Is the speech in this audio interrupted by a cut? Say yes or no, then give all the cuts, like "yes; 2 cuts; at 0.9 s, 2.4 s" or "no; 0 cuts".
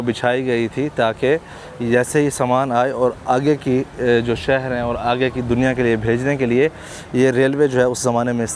no; 0 cuts